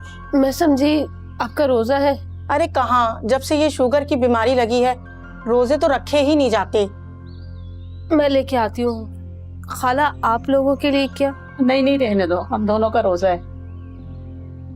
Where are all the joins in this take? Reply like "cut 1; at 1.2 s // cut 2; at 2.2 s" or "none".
none